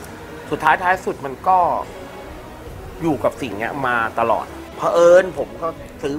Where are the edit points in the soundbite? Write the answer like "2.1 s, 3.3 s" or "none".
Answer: 4.6 s